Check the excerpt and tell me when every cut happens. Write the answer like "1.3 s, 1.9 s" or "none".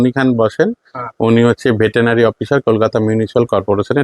none